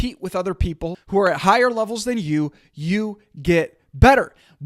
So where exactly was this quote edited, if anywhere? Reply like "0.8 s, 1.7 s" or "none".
1.0 s